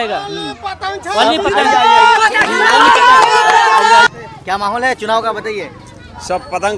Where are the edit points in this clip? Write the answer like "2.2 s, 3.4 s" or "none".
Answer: 4.1 s